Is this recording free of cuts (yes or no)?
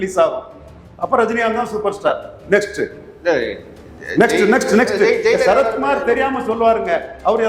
yes